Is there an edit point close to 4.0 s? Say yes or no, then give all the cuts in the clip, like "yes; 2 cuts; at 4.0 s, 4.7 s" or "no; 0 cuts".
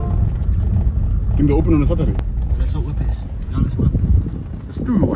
no; 1 cut; at 2.2 s